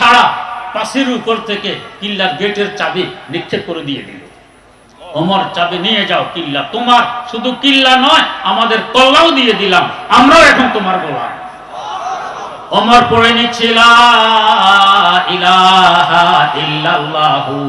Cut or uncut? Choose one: uncut